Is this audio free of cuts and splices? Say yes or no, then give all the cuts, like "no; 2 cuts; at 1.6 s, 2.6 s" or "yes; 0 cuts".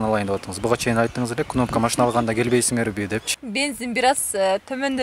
no; 1 cut; at 3.4 s